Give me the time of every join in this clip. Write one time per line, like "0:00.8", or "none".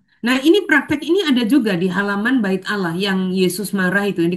none